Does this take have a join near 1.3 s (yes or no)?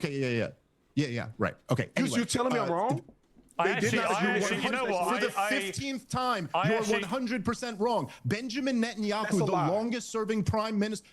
yes